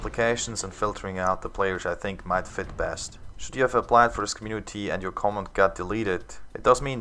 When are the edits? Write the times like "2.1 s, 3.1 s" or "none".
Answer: 1.7 s